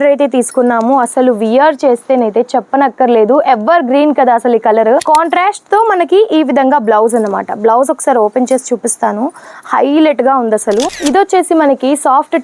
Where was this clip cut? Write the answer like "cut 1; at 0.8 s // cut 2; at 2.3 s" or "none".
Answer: cut 1; at 5.0 s // cut 2; at 10.9 s